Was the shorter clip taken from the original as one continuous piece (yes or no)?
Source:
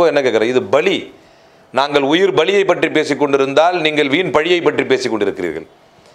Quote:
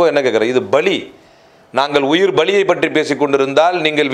yes